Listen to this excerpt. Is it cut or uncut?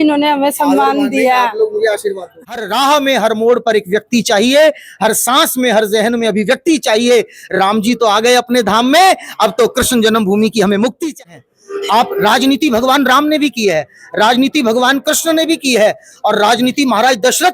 cut